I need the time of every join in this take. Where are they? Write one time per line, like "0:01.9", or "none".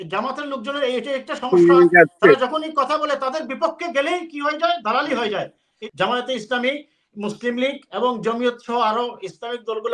0:05.8